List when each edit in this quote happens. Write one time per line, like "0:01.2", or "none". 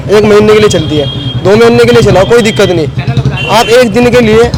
none

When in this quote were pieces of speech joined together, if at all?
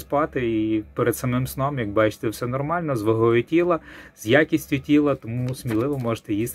none

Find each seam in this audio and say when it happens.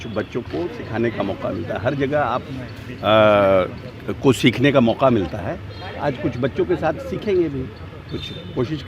none

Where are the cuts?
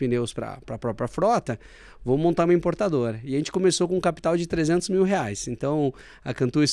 none

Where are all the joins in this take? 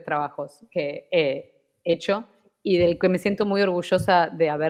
none

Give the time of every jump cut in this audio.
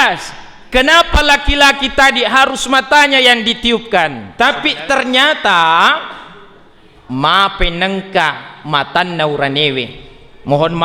0:04.2

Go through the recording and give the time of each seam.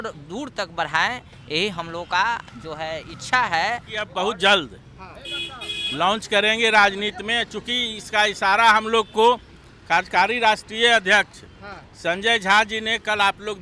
0:04.1

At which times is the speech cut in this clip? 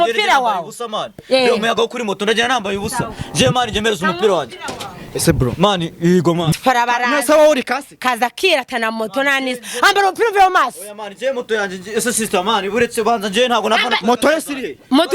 0:06.5

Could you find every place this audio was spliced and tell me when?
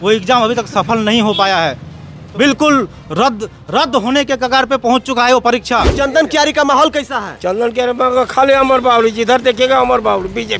0:05.9

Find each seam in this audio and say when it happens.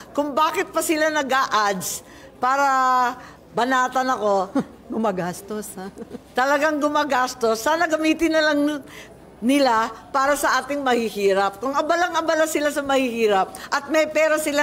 none

